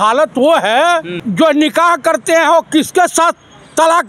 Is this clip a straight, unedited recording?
no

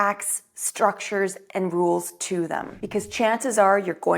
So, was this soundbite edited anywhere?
yes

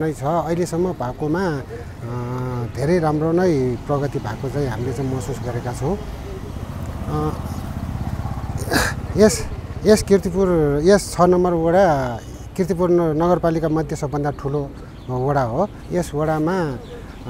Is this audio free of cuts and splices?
yes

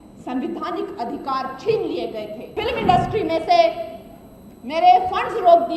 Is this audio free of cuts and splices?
no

